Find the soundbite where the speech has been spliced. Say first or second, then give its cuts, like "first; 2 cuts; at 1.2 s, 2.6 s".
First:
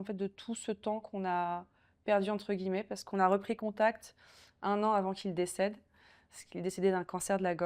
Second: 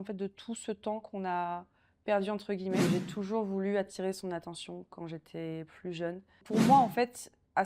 second; 2 cuts; at 2.8 s, 6.4 s